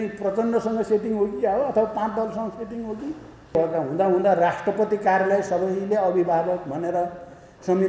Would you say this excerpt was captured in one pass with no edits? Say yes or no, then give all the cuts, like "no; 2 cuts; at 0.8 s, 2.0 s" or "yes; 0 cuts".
no; 1 cut; at 3.5 s